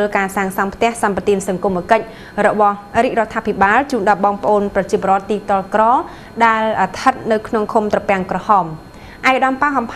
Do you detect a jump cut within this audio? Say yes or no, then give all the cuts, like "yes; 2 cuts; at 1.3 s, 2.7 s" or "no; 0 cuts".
no; 0 cuts